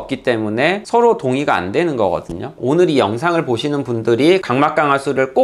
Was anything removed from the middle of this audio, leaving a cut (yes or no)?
yes